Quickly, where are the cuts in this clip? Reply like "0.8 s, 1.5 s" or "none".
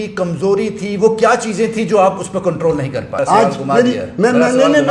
3.1 s